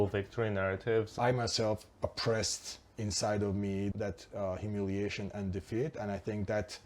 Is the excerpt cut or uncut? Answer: cut